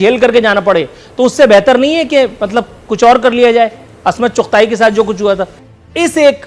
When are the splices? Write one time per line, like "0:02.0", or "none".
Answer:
0:05.5